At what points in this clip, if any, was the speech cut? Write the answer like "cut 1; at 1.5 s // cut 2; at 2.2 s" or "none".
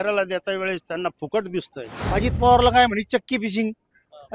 cut 1; at 2.0 s